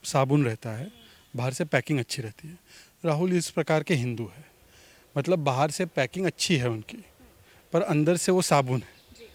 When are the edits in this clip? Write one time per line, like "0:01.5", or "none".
none

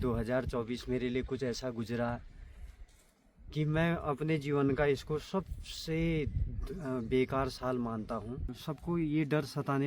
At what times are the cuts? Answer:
0:08.5

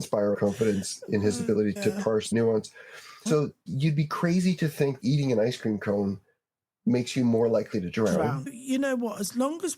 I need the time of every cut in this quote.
0:03.1
0:08.4

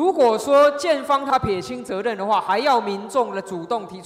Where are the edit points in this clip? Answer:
0:01.3

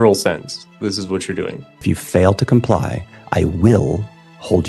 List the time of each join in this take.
0:01.8

